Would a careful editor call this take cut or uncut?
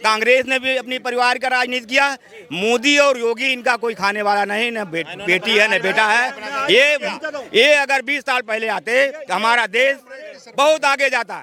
uncut